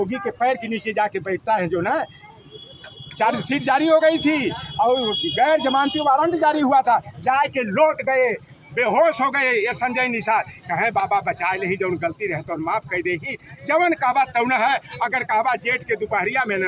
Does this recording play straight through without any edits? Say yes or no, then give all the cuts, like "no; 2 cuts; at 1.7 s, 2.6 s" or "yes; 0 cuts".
yes; 0 cuts